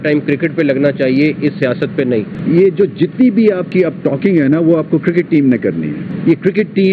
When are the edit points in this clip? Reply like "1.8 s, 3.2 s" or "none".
2.3 s, 6.0 s